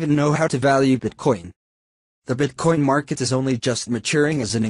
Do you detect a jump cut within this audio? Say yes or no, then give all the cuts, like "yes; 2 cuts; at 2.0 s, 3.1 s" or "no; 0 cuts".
no; 0 cuts